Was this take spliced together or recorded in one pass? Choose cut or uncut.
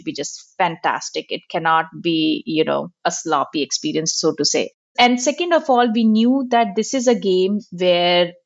cut